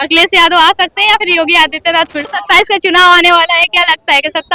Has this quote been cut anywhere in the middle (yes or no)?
yes